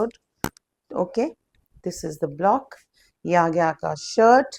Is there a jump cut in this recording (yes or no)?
no